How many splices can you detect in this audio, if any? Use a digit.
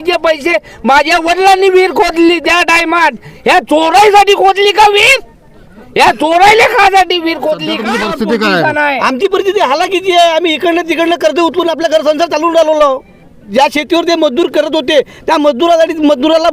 2